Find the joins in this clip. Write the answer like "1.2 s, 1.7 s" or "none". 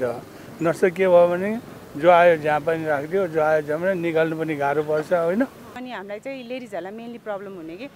5.8 s